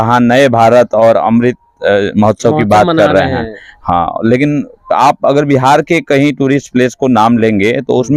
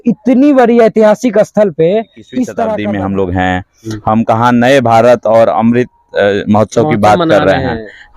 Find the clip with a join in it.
second; 1 cut; at 2.8 s

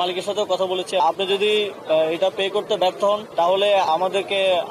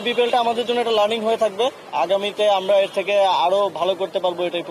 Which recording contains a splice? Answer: first; 2 cuts; at 1.0 s, 3.8 s

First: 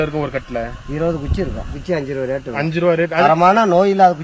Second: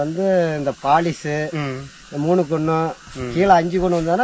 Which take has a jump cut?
first; 2 cuts; at 1.7 s, 3.2 s

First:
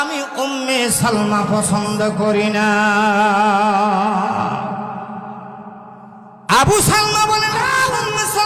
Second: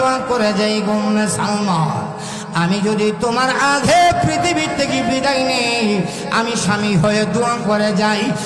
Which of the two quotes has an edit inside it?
first; 1 cut; at 6.3 s

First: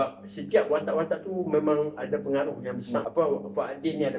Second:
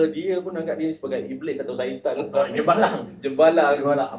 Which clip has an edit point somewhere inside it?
first; 1 cut; at 3.1 s

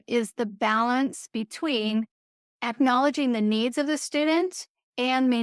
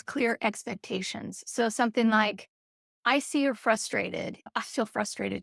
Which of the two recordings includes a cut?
second; 1 cut; at 4.5 s

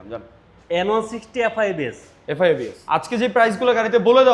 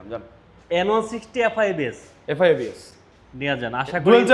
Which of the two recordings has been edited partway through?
first; 1 cut; at 3.1 s

